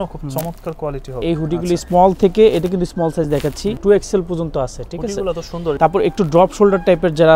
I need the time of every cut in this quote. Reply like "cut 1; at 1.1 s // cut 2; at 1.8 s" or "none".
cut 1; at 1.1 s // cut 2; at 3.8 s // cut 3; at 5.8 s